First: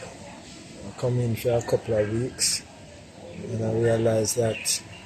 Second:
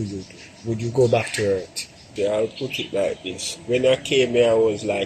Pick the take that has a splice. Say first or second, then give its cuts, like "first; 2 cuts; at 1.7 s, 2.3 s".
second; 1 cut; at 2.1 s